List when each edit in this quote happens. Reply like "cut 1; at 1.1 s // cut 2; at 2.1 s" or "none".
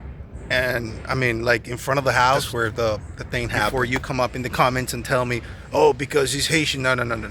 cut 1; at 2.5 s // cut 2; at 3.7 s